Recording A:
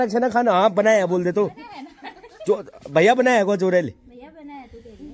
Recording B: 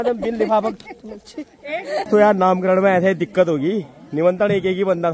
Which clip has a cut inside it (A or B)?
B